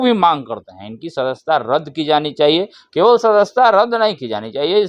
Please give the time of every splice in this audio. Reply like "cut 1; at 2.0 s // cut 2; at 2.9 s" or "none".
none